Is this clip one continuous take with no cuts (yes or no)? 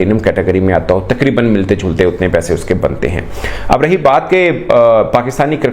yes